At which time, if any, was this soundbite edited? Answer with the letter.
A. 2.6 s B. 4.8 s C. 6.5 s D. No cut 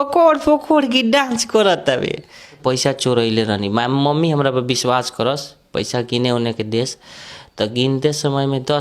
A